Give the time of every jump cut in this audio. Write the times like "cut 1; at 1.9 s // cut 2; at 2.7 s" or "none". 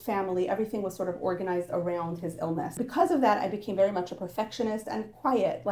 cut 1; at 2.7 s